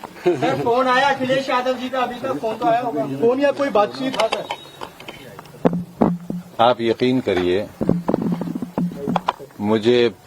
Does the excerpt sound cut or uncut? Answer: uncut